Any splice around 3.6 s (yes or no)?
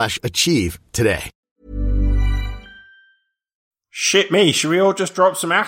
yes